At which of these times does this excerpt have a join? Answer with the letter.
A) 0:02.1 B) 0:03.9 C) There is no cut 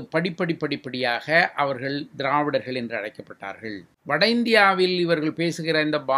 B